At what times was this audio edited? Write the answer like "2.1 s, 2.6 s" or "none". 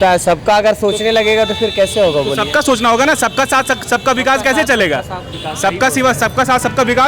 none